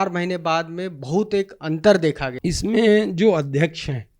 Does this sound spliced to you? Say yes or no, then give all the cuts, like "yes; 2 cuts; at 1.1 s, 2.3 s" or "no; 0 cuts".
yes; 1 cut; at 2.3 s